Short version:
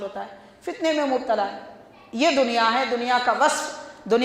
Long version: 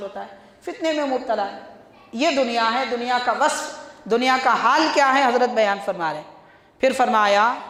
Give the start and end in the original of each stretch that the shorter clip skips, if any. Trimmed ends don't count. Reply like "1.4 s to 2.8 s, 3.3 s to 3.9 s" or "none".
none